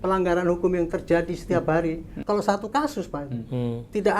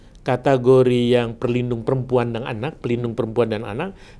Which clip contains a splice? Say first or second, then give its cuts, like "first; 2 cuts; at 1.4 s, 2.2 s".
first; 1 cut; at 2.2 s